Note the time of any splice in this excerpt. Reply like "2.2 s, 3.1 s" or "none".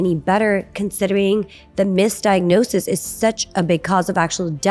none